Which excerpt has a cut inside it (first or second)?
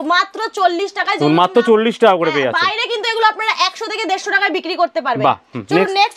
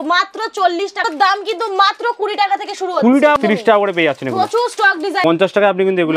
second